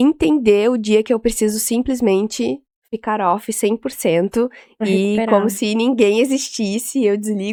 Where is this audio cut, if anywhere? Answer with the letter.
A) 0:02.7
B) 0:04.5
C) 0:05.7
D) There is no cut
D